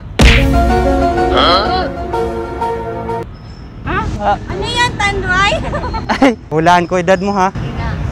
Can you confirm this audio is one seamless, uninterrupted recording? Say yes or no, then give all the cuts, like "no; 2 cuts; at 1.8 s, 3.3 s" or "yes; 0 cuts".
no; 1 cut; at 6.4 s